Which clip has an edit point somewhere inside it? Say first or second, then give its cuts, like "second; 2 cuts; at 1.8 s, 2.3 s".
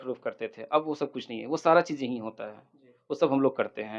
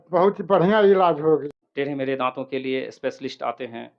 second; 1 cut; at 1.4 s